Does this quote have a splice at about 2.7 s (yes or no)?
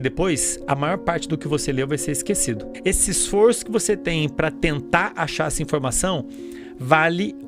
yes